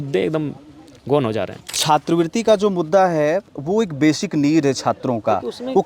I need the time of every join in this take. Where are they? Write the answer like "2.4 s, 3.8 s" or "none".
1.7 s